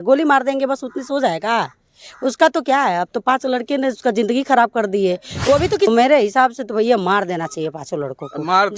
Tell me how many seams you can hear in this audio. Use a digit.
1